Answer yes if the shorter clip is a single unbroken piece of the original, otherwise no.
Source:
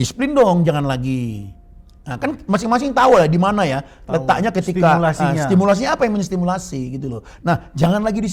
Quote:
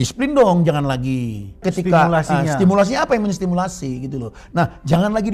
no